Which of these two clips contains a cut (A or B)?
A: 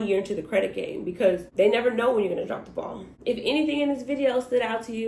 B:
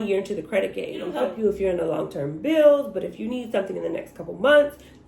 B